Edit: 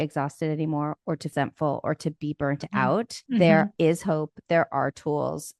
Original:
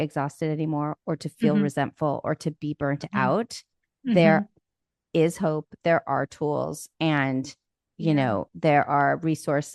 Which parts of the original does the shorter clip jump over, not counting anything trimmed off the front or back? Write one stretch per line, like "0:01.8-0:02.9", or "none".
0:01.3-0:01.7
0:03.6-0:03.9
0:04.5-0:05.1

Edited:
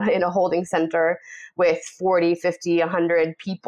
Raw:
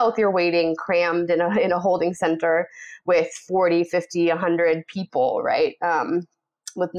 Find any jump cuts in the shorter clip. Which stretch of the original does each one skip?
none

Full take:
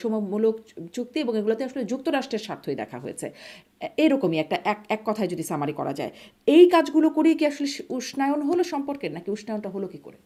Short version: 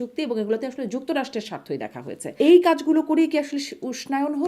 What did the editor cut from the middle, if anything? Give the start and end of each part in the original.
0:03.2-0:06.3

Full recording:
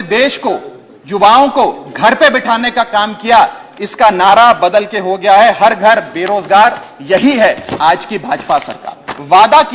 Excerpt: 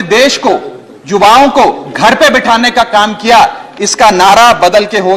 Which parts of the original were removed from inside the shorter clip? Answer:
none

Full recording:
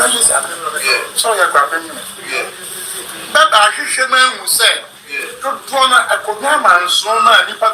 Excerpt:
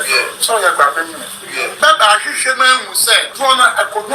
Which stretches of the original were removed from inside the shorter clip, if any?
0:02.5-0:03.3
0:04.8-0:05.6

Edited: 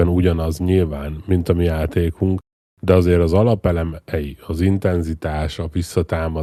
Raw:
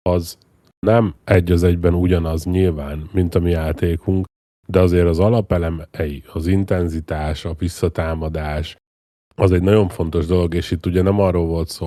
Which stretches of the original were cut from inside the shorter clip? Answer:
none

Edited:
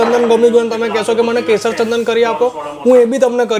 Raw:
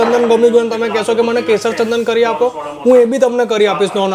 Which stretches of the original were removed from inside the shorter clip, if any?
none

